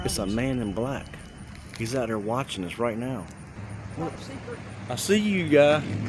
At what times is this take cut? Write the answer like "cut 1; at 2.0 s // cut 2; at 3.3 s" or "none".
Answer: cut 1; at 3.4 s